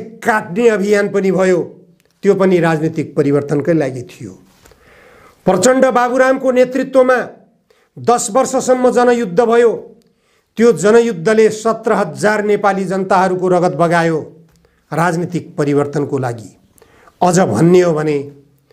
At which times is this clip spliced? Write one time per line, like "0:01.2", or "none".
none